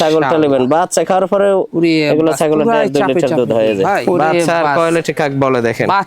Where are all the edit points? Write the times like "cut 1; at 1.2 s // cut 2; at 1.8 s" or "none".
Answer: cut 1; at 4.0 s